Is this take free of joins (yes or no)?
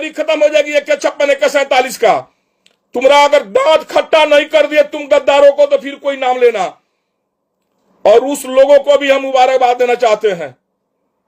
yes